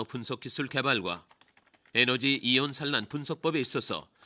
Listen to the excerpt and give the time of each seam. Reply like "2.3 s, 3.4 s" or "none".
3.0 s